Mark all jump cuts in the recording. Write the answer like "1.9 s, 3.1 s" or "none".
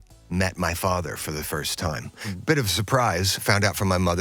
2.3 s